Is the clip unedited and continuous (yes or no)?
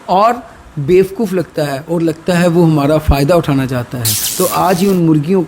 no